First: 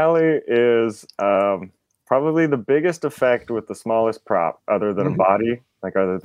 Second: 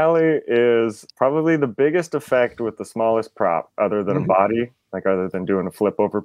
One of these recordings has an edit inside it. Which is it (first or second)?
second